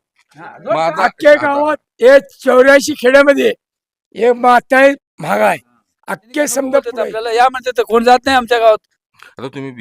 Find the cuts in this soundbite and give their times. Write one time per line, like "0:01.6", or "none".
0:07.0